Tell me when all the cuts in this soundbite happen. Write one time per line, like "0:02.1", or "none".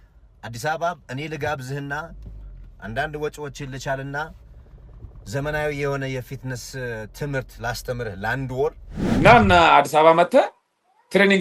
0:09.1